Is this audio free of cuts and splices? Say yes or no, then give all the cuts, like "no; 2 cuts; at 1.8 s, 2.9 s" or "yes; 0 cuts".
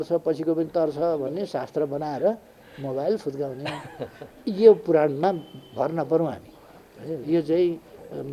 yes; 0 cuts